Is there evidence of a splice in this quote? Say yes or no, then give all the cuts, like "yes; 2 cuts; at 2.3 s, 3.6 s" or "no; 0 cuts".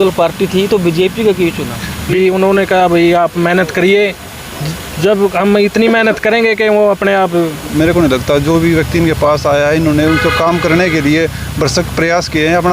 yes; 2 cuts; at 2.1 s, 7.7 s